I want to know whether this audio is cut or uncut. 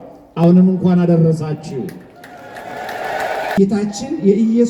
cut